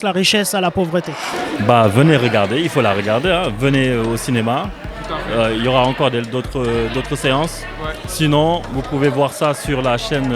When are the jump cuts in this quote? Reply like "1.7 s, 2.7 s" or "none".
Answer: 1.3 s